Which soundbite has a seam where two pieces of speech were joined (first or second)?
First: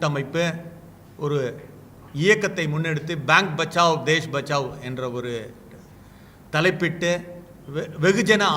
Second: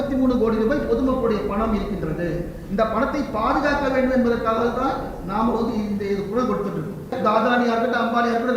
second